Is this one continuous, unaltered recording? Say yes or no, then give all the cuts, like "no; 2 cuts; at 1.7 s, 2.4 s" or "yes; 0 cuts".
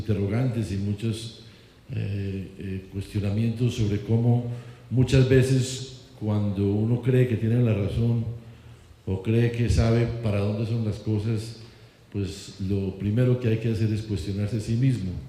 no; 1 cut; at 4.8 s